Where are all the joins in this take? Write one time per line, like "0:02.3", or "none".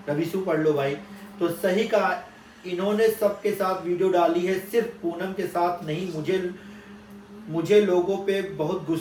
none